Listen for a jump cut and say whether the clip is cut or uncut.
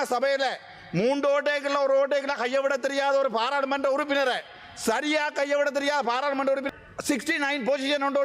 cut